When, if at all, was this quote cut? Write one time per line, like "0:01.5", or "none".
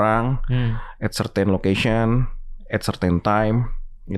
none